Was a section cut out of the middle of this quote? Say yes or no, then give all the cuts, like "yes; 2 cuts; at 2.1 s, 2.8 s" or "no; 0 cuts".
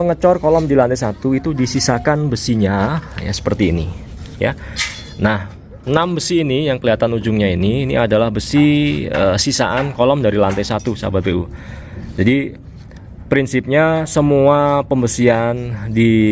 no; 0 cuts